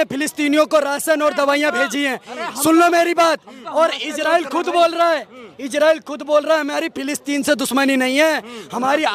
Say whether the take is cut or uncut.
uncut